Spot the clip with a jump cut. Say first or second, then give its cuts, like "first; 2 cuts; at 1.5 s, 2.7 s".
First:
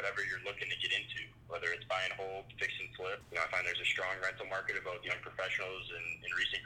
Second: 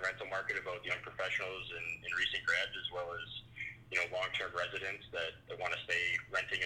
first; 1 cut; at 3.2 s